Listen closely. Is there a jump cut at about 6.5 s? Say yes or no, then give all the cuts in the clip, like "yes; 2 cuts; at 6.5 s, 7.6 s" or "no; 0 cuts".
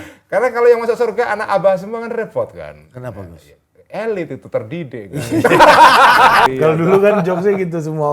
yes; 1 cut; at 6.5 s